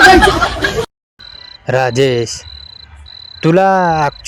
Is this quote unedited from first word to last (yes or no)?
yes